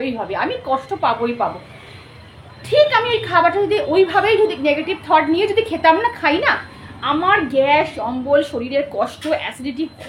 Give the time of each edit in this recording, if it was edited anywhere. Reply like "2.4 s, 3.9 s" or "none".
none